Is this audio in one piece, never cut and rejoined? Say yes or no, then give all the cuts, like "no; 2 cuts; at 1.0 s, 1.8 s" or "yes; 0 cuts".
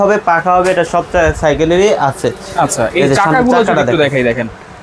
yes; 0 cuts